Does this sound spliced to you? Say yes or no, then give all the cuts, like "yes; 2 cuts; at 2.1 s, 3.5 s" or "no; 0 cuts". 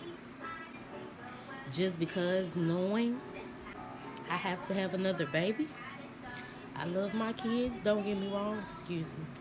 yes; 2 cuts; at 0.8 s, 3.7 s